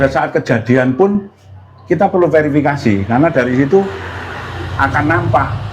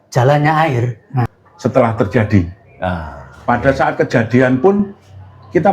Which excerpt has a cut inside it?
second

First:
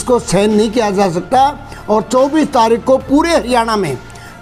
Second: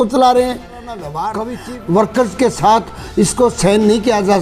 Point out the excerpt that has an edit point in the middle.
second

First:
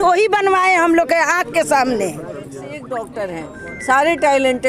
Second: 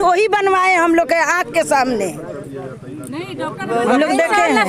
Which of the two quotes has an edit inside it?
first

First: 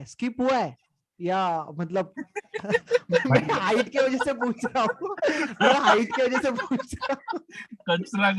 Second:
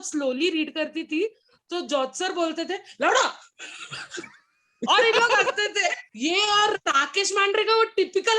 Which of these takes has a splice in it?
second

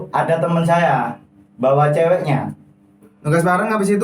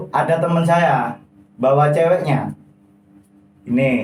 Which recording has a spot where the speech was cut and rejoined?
first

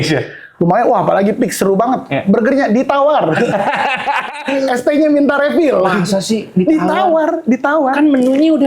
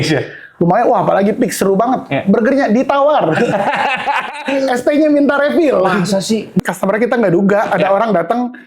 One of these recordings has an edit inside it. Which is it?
second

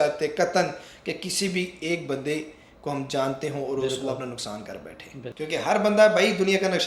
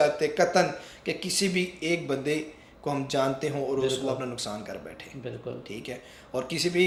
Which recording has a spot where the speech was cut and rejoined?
first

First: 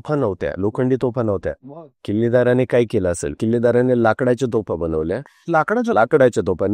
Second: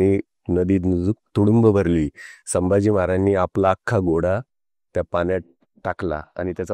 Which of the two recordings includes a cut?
first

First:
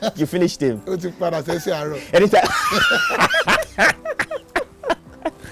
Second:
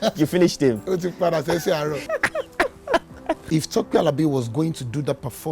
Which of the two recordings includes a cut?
second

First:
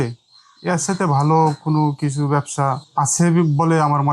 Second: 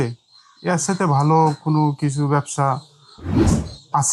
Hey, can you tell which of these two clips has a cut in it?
first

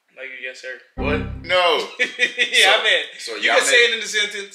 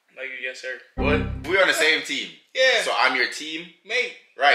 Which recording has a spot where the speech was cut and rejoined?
second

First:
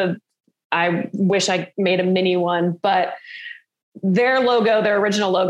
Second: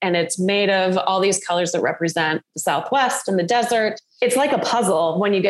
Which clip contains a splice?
second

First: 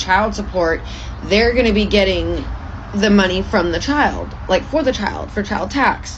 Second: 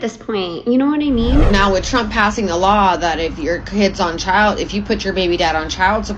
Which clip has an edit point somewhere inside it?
second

